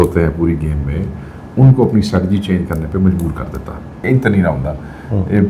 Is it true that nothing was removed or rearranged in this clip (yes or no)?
no